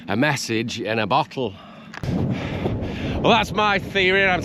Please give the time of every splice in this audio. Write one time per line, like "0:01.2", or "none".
0:02.0

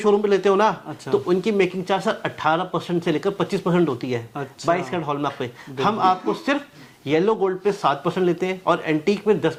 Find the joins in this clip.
none

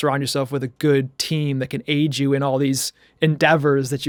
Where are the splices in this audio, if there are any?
none

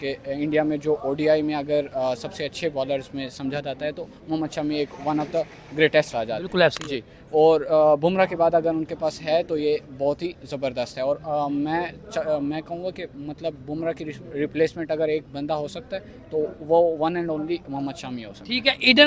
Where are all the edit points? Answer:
none

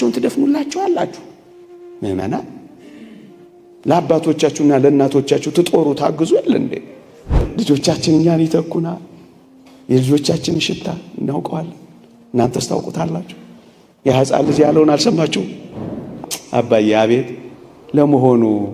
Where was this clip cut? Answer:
0:07.4
0:16.2

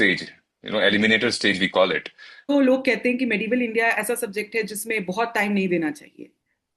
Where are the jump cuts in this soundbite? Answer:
0:02.5

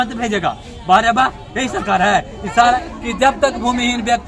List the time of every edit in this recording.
0:02.6

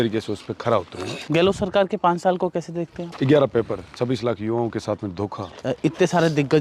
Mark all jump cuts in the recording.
0:01.2
0:03.0
0:05.5

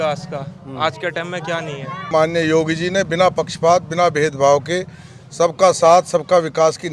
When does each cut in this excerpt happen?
0:02.1

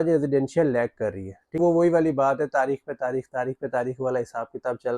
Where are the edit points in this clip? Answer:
0:01.6

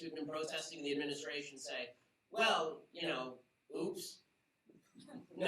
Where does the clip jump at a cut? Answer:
0:01.1

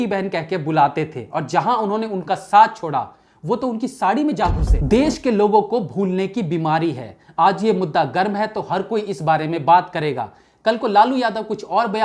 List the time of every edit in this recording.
0:04.7

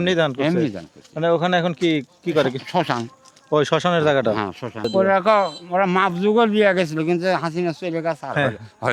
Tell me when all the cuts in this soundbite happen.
0:04.9

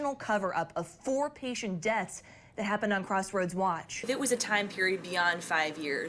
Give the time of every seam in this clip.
0:04.1

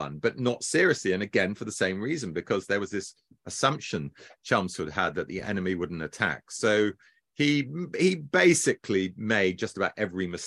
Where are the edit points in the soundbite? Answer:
none

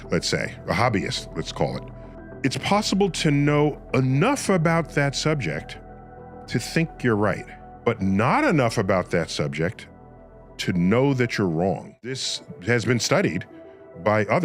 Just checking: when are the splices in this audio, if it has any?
0:12.2

